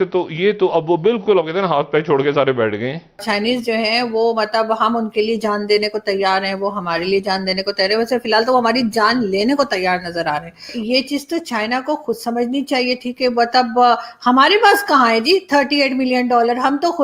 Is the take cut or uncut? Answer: cut